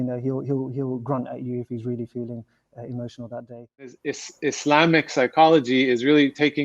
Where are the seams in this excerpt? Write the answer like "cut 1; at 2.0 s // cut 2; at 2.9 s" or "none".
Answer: cut 1; at 4.1 s